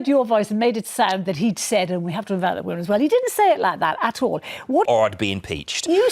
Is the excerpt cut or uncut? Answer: cut